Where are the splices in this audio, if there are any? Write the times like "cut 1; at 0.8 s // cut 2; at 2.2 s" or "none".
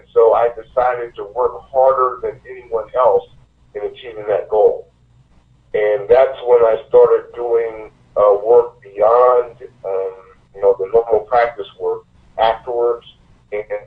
none